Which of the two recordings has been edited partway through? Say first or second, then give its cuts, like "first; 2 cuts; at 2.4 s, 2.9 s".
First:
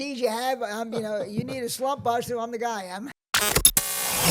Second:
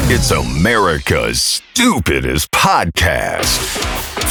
first; 1 cut; at 3.1 s